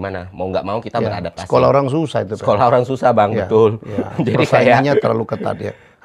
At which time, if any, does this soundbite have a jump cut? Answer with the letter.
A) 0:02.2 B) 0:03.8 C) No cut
C